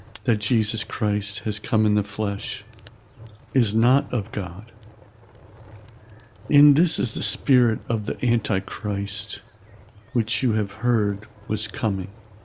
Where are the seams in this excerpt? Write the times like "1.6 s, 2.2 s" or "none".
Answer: 4.7 s, 6.5 s